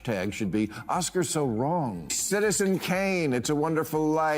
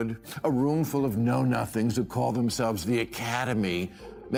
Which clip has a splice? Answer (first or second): first